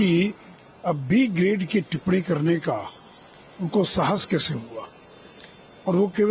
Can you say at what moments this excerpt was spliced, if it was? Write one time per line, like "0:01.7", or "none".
none